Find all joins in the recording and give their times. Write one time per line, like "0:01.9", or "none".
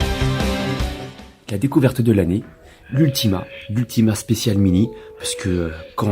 0:01.1

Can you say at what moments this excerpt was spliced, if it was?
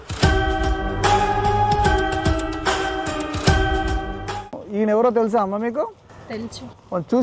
0:04.5

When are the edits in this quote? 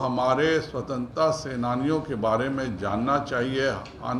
none

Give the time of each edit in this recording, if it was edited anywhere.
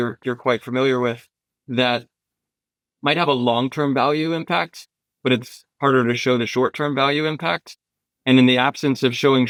none

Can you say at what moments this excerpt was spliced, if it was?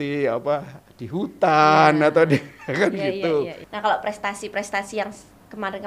0:03.6

